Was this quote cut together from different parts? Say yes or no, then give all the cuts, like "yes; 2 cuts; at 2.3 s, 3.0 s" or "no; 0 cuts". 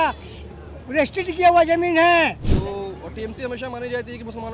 yes; 1 cut; at 2.5 s